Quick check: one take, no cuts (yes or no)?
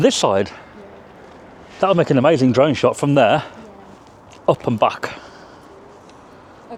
yes